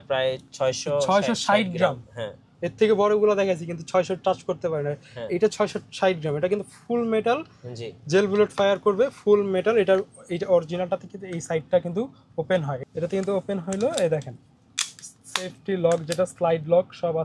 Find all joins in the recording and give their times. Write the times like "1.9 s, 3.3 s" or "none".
12.8 s